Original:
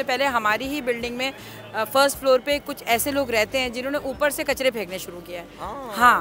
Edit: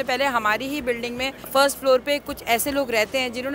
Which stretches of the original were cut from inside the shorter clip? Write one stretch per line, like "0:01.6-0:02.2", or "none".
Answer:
0:01.5-0:01.9